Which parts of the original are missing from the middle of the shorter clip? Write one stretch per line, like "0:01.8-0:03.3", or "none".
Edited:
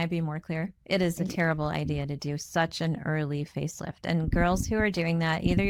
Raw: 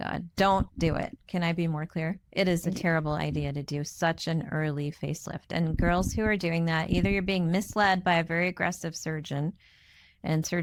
none